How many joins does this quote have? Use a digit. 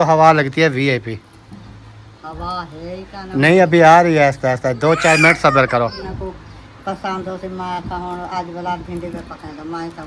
1